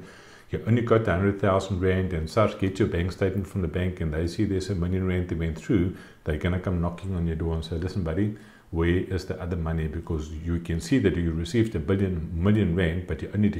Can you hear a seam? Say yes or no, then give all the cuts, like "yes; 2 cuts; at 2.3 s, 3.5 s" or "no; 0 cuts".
no; 0 cuts